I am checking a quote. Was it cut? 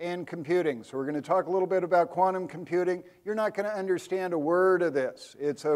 yes; 1 cut; at 1.5 s

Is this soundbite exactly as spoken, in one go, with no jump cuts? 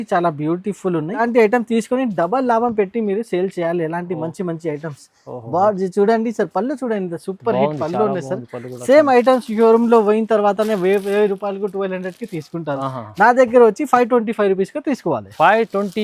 no; 1 cut; at 1.2 s

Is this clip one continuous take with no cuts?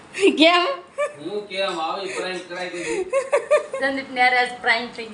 no; 1 cut; at 3.7 s

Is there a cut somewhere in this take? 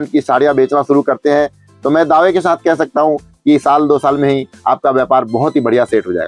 no; 0 cuts

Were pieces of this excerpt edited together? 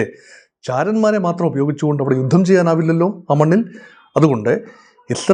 no; 0 cuts

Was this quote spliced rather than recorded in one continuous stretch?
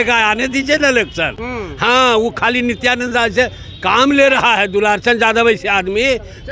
no; 0 cuts

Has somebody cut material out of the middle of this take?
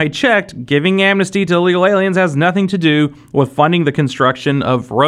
no; 0 cuts

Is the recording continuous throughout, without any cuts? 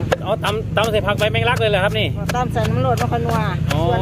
yes; 0 cuts

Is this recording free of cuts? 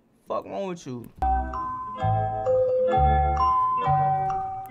no; 1 cut; at 1.2 s

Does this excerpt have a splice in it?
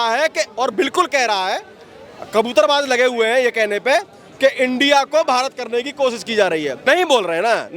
yes; 1 cut; at 6.8 s

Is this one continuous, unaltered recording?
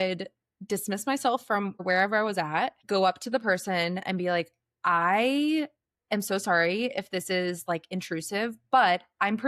no; 2 cuts; at 1.8 s, 2.8 s

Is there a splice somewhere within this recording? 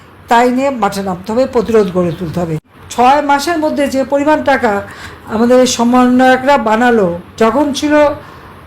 yes; 2 cuts; at 2.8 s, 7.3 s

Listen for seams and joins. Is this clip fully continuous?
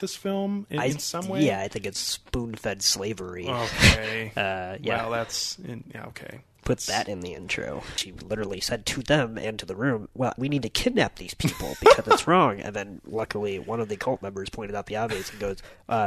no; 2 cuts; at 7.8 s, 10.4 s

